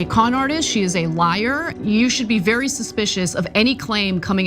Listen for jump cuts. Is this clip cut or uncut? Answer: cut